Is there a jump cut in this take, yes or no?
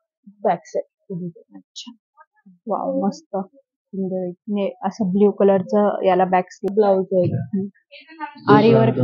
yes